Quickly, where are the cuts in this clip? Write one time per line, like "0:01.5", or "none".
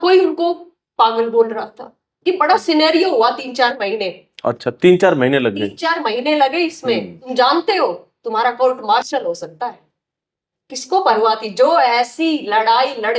0:07.2

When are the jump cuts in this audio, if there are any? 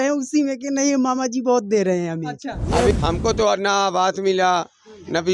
0:02.9

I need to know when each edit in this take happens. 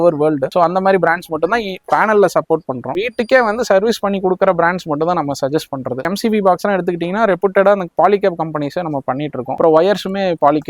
0:02.9
0:06.1
0:09.6

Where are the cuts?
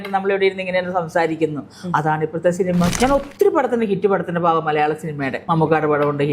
0:02.9
0:05.4

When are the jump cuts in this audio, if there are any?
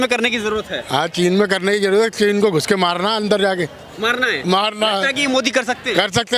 none

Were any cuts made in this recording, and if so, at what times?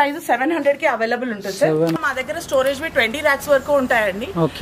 0:02.0

